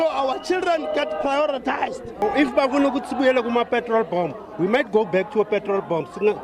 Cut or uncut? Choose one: cut